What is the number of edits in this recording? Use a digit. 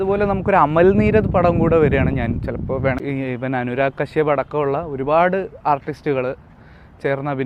1